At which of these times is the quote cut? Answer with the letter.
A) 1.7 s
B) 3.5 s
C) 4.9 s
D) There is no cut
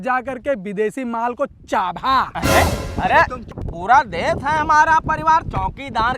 B